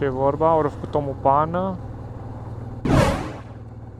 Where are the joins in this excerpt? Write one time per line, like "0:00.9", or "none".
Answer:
none